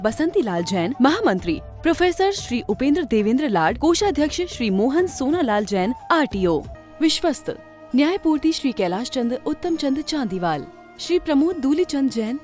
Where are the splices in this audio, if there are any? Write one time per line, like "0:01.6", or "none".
0:06.8